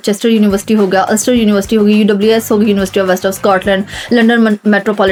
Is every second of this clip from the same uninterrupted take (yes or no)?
yes